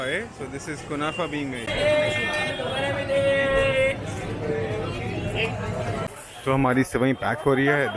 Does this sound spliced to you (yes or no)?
yes